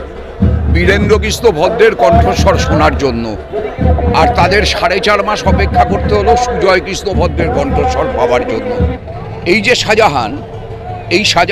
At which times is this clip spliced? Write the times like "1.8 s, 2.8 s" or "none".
9.0 s

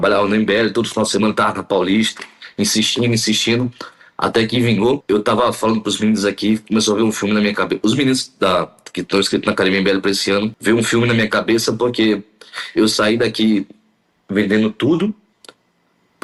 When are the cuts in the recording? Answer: none

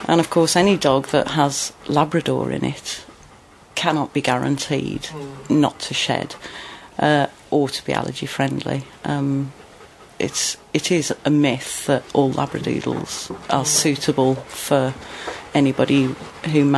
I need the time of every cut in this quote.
none

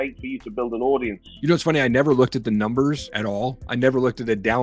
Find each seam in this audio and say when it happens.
1.3 s, 3.1 s

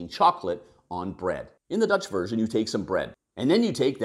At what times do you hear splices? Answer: 1.5 s, 3.1 s

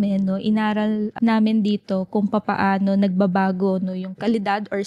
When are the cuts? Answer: 1.1 s

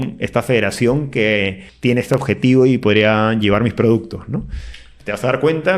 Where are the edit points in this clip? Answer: 1.6 s

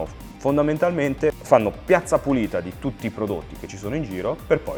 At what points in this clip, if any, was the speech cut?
none

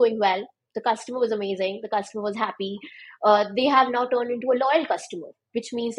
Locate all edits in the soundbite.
none

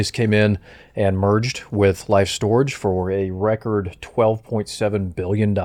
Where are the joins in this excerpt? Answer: none

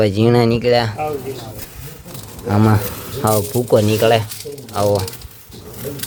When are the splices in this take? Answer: none

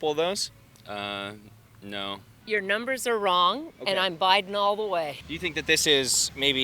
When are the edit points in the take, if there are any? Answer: 2.3 s, 5.2 s

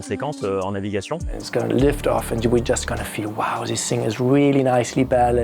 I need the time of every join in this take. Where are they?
1.4 s

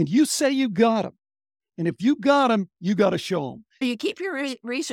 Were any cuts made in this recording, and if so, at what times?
3.8 s

